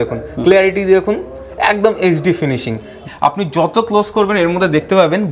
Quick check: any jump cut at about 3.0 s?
yes; 1 cut; at 3.0 s

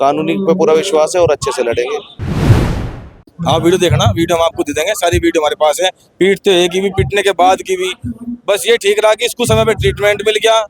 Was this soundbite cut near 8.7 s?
no; 2 cuts; at 2.1 s, 3.1 s

